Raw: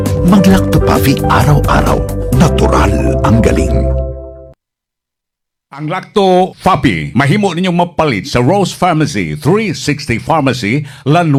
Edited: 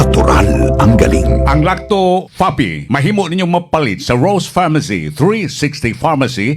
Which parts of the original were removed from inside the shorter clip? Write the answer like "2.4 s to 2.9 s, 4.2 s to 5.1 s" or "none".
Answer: 4.0 s to 5.8 s